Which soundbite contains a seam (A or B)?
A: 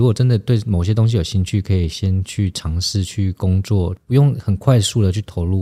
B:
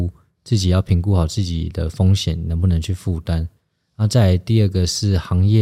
A